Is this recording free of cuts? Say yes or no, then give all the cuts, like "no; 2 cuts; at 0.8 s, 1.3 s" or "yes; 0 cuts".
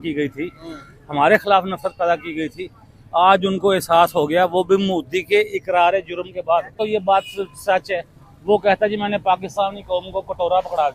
no; 1 cut; at 6.8 s